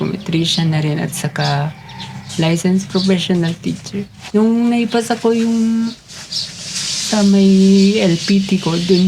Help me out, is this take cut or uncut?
uncut